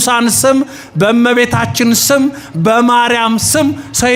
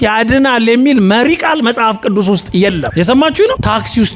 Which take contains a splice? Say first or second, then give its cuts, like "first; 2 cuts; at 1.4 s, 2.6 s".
second; 1 cut; at 2.9 s